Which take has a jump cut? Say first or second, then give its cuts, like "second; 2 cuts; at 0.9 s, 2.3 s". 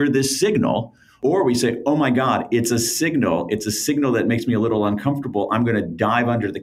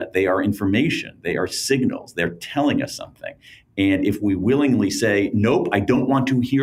first; 1 cut; at 1.2 s